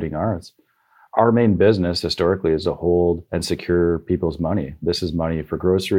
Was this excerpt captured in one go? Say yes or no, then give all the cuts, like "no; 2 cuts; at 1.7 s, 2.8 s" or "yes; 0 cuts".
no; 2 cuts; at 1.1 s, 3.3 s